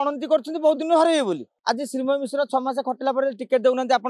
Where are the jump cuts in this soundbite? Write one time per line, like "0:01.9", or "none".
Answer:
0:01.5